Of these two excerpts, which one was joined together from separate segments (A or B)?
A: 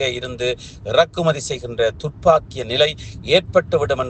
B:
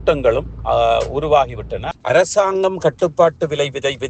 B